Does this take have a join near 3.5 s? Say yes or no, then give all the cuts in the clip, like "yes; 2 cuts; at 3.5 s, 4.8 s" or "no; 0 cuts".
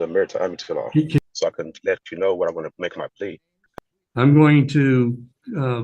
yes; 2 cuts; at 1.2 s, 3.5 s